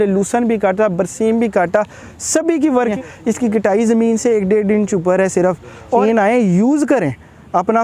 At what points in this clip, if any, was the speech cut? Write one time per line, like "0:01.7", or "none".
0:02.9
0:06.0